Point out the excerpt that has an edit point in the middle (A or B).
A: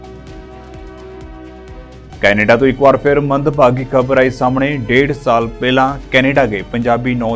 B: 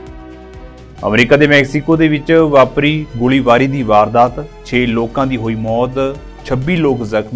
A